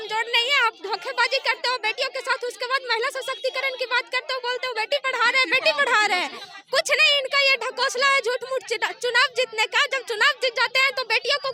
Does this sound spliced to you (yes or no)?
no